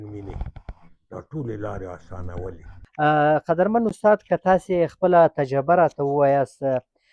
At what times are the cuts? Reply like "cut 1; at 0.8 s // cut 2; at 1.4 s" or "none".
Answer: cut 1; at 2.8 s

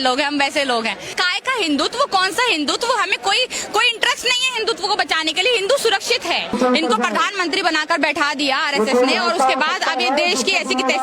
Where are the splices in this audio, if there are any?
cut 1; at 1.2 s // cut 2; at 6.5 s

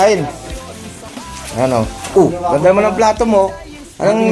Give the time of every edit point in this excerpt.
none

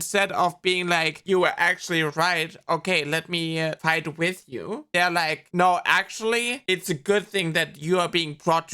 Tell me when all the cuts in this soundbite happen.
cut 1; at 3.8 s // cut 2; at 5.4 s

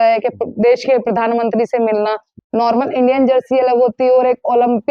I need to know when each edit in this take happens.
cut 1; at 2.3 s

